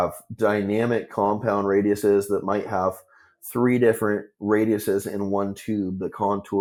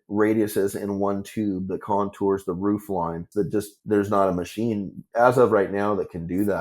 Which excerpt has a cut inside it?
second; 2 cuts; at 3.6 s, 5.0 s

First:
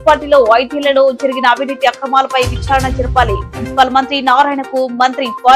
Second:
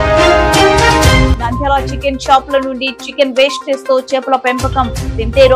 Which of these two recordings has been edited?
second; 1 cut; at 1.3 s

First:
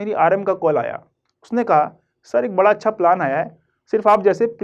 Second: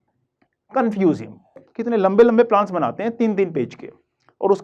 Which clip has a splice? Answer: second; 1 cut; at 1.7 s

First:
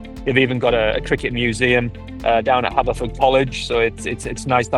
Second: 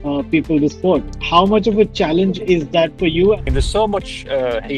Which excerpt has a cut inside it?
second; 2 cuts; at 1.1 s, 3.5 s

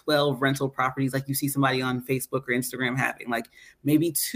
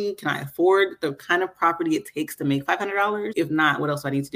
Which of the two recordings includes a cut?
second; 1 cut; at 3.3 s

